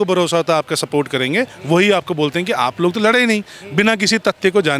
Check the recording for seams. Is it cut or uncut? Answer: uncut